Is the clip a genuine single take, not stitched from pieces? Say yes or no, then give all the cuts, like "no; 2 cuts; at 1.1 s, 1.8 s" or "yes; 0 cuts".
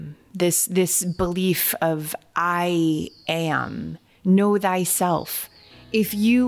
yes; 0 cuts